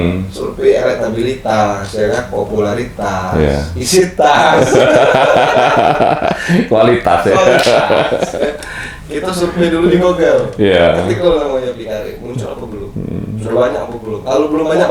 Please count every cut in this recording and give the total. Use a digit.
0